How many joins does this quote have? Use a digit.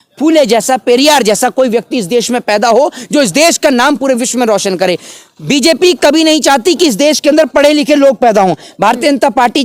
0